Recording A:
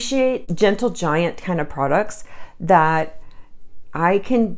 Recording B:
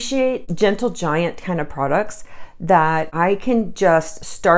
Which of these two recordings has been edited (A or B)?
B